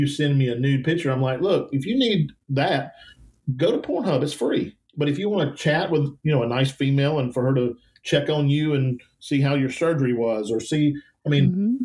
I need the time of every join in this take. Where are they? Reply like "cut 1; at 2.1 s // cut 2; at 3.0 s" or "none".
cut 1; at 4.8 s // cut 2; at 6.2 s